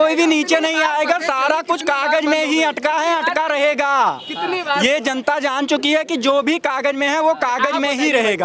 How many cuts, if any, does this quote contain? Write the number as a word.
zero